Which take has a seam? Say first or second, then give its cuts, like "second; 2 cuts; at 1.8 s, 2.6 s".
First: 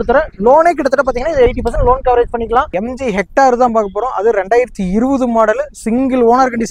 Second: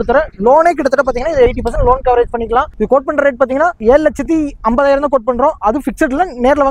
first; 1 cut; at 2.7 s